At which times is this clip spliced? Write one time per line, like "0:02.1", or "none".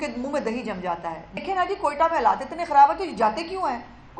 0:01.3